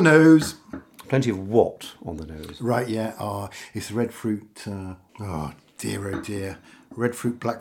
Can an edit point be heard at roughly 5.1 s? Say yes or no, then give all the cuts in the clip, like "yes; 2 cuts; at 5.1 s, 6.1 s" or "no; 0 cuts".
yes; 1 cut; at 5.1 s